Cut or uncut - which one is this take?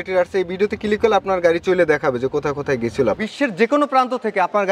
cut